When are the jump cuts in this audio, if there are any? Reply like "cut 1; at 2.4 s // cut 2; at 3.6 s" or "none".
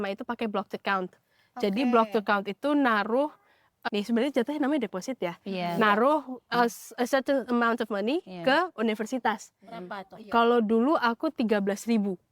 none